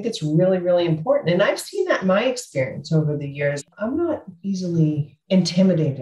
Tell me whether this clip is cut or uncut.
cut